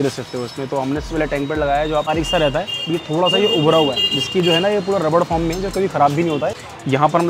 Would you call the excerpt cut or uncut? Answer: cut